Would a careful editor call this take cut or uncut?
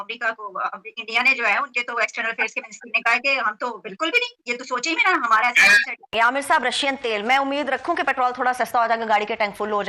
cut